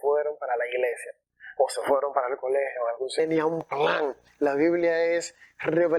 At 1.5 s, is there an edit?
no; 1 cut; at 3.2 s

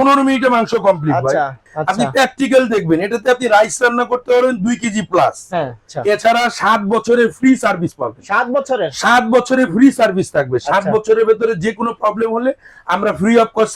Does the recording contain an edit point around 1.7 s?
yes; 2 cuts; at 1.7 s, 5.9 s

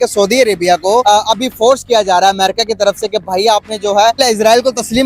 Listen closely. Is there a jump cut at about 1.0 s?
yes; 2 cuts; at 1.0 s, 4.2 s

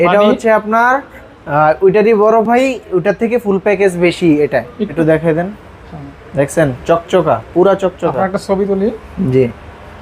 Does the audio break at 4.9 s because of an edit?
yes; 1 cut; at 4.9 s

